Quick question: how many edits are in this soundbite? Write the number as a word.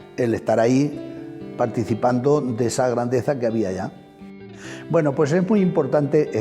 one